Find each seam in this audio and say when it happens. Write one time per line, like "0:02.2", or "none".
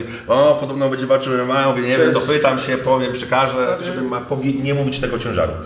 0:03.8